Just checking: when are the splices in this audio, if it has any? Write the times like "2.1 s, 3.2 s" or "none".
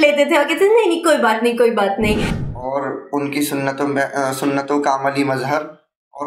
2.4 s

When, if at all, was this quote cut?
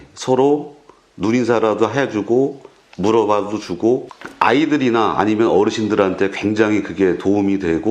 4.1 s

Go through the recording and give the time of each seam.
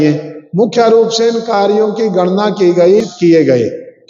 3.1 s

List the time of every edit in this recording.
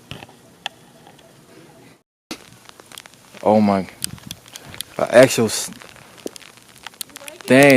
2.0 s

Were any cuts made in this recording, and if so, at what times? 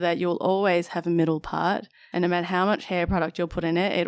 2.0 s

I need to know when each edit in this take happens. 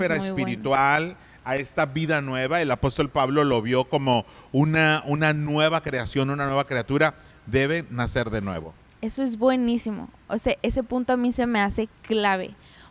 none

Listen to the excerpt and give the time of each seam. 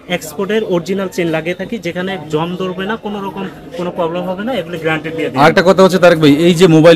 none

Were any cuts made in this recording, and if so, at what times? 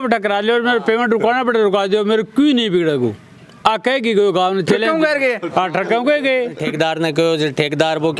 6.6 s

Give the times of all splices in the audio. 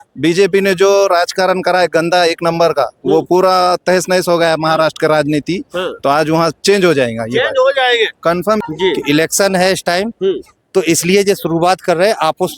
8.6 s

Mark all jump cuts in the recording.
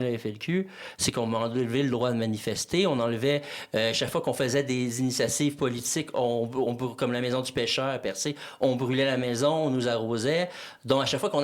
none

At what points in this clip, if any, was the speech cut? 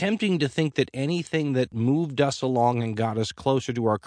1.7 s

